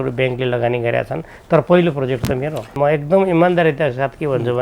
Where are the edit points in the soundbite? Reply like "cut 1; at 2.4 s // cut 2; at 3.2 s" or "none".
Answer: cut 1; at 2.7 s

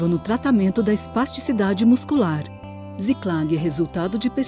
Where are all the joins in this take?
cut 1; at 2.5 s

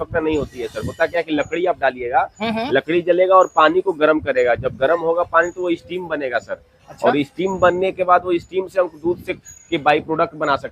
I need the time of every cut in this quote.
none

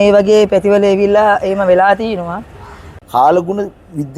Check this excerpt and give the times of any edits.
cut 1; at 3.0 s

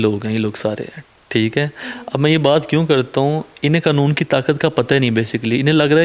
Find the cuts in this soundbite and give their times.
none

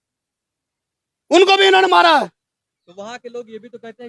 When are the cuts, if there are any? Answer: none

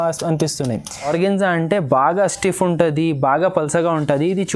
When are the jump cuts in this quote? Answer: cut 1; at 1.1 s

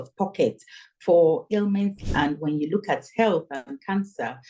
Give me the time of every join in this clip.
cut 1; at 2.0 s

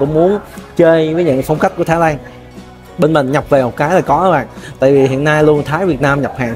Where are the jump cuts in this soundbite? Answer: none

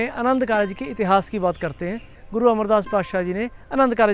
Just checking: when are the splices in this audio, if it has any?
cut 1; at 2.2 s

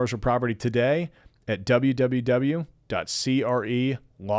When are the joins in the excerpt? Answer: none

